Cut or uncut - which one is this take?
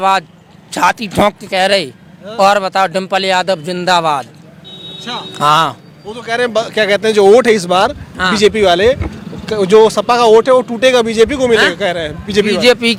uncut